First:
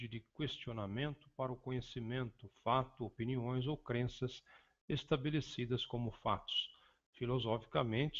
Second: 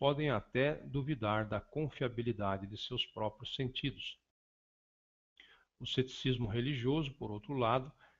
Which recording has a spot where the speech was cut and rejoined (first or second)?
first